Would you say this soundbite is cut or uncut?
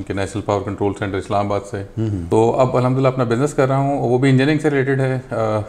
cut